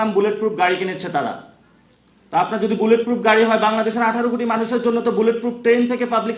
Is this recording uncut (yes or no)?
yes